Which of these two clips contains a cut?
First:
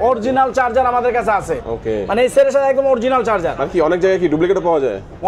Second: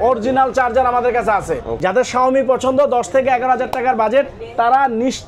second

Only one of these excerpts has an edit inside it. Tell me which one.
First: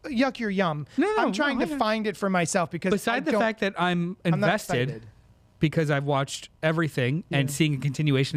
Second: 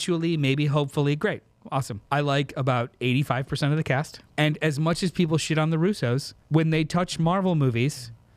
second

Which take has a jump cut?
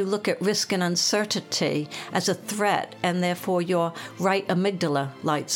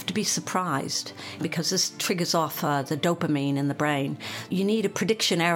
second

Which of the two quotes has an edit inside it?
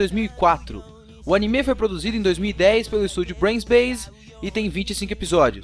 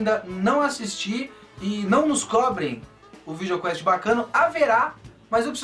second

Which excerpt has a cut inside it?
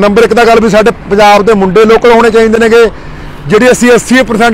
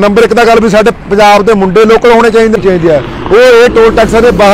second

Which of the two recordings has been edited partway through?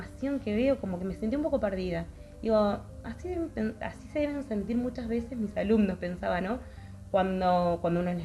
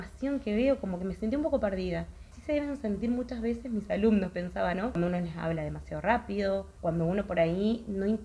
second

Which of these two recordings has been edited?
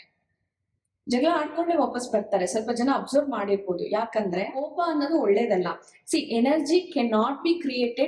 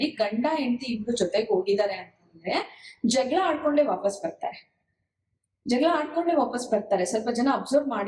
first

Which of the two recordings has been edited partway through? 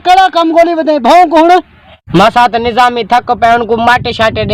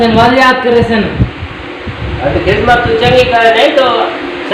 first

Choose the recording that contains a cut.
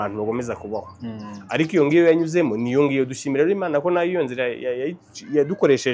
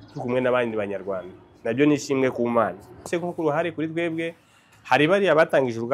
second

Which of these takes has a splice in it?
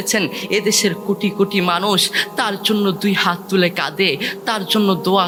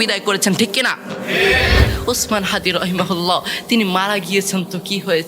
second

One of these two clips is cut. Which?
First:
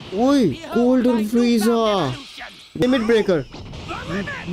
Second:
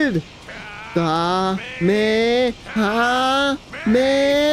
first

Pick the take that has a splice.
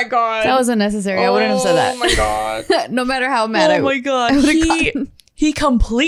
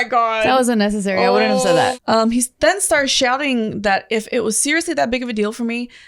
second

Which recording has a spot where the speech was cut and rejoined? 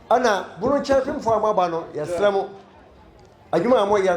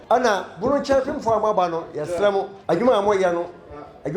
second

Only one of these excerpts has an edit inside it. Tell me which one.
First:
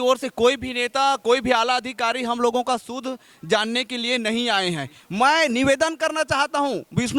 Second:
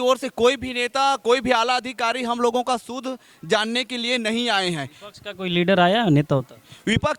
first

